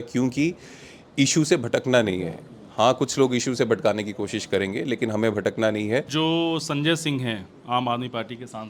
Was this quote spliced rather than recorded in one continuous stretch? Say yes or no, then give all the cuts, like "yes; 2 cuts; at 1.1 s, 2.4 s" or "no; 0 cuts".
yes; 1 cut; at 6.1 s